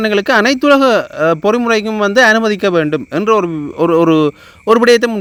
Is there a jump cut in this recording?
no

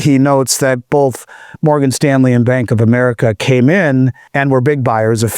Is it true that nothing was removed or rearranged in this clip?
no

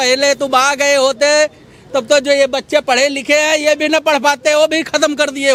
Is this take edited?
no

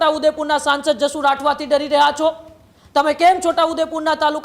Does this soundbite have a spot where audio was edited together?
no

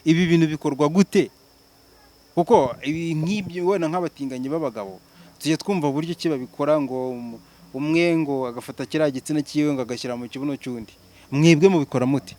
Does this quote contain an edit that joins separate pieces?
no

